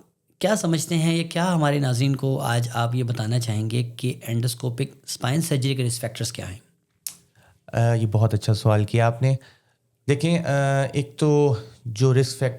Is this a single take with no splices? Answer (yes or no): yes